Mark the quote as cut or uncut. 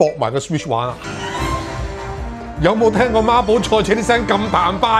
cut